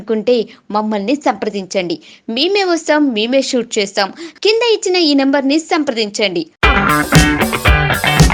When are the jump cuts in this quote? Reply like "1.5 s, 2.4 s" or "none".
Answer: none